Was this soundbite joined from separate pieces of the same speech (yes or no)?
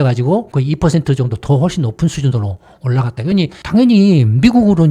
no